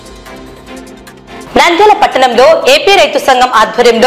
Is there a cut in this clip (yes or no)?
yes